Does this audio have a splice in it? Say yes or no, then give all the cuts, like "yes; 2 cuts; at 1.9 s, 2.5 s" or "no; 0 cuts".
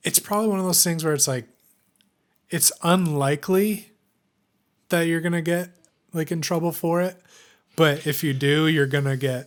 no; 0 cuts